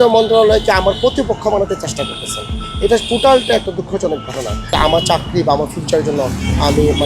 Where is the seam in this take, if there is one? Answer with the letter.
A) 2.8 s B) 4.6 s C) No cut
B